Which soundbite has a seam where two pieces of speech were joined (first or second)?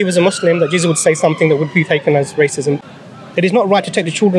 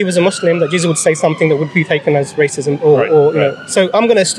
first